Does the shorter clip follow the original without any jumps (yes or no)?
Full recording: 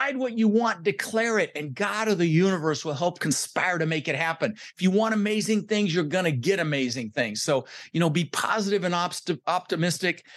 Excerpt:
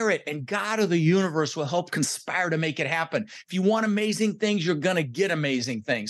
yes